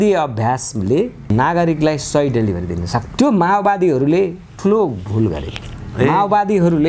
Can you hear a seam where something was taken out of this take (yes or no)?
yes